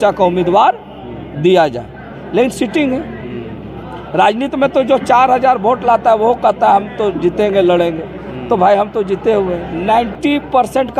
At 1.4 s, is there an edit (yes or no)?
no